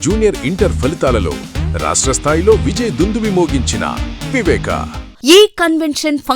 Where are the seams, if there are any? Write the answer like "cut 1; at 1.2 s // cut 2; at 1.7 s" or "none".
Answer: cut 1; at 5.0 s